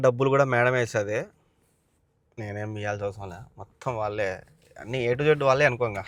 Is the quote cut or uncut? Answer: uncut